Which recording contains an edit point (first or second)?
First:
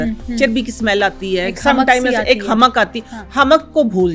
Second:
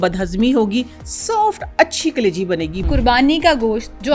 second